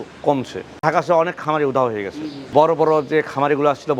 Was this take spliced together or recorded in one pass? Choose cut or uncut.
cut